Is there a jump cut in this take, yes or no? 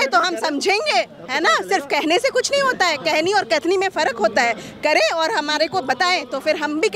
no